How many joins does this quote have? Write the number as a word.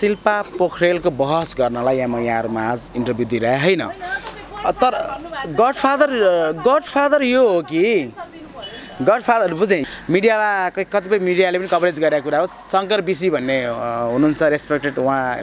one